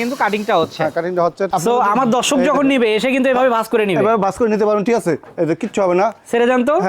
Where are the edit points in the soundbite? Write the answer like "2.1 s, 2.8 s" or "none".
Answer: 1.5 s